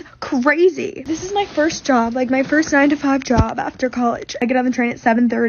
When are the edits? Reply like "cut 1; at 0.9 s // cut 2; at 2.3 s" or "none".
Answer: cut 1; at 1.1 s // cut 2; at 4.4 s